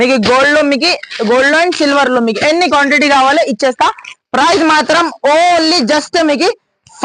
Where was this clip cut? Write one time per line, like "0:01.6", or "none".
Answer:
none